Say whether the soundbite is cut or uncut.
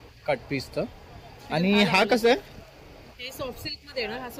uncut